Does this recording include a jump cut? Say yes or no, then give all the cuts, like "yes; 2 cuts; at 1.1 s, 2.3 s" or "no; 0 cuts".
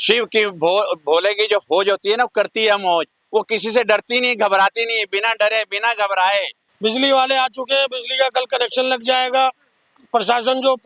yes; 2 cuts; at 6.6 s, 9.8 s